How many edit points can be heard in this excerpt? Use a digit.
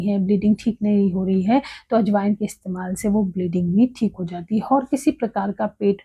0